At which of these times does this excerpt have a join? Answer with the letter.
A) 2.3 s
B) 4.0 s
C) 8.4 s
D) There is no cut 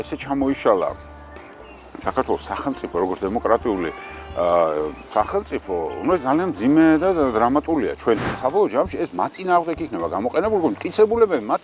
C